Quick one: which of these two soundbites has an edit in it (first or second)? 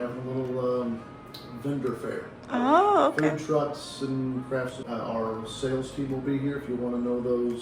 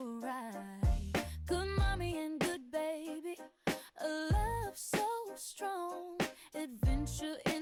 first